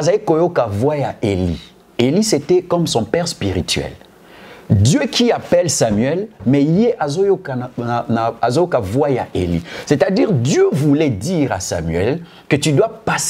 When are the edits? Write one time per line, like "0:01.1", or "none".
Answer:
none